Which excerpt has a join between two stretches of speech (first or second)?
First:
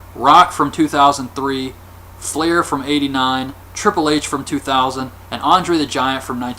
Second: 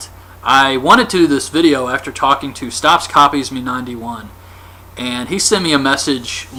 first